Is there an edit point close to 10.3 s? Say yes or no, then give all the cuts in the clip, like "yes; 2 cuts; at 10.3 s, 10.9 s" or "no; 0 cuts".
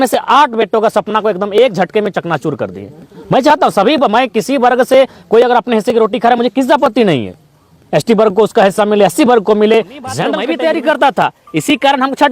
yes; 1 cut; at 10.3 s